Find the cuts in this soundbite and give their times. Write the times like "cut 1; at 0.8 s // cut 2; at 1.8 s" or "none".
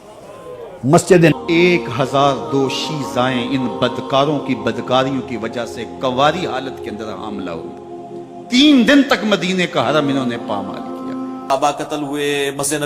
cut 1; at 1.3 s // cut 2; at 11.5 s